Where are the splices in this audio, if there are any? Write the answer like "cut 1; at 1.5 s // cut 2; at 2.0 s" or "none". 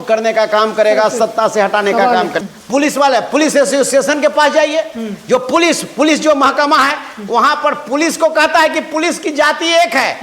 cut 1; at 2.4 s